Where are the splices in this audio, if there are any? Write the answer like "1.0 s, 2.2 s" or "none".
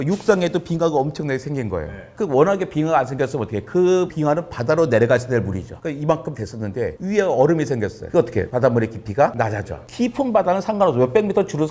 none